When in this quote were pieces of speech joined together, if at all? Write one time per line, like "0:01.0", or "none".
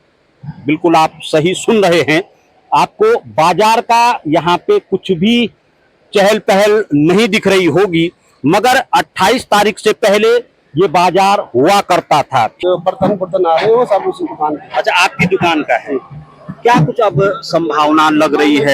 0:12.6